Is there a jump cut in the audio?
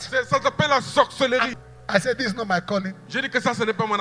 yes; 1 cut; at 1.5 s

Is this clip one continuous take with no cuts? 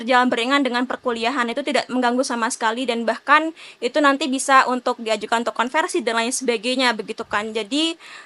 yes; 0 cuts

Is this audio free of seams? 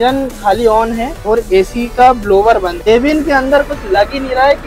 no; 2 cuts; at 1.1 s, 2.9 s

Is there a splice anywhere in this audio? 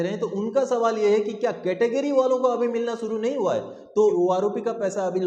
yes; 1 cut; at 4.1 s

